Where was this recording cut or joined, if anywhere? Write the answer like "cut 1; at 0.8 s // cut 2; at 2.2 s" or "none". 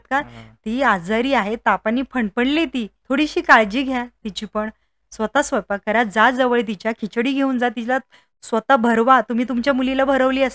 cut 1; at 2.9 s